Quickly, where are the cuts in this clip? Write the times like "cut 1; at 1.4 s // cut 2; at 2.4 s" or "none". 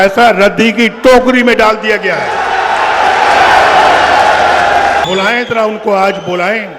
cut 1; at 5.0 s